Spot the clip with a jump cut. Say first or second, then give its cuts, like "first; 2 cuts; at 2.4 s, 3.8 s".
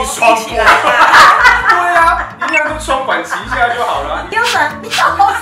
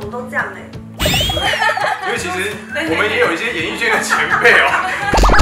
first; 1 cut; at 4.3 s